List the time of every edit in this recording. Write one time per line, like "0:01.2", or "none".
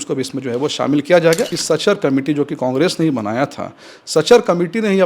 0:01.5